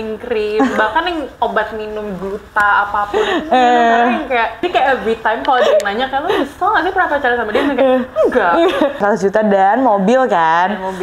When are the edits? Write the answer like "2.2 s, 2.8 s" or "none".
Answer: 4.6 s, 9.0 s